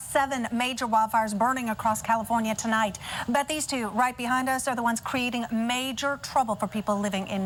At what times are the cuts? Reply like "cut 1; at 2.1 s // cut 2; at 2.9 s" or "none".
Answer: none